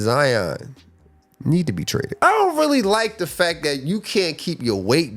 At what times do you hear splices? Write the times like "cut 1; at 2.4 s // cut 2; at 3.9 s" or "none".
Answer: cut 1; at 2.2 s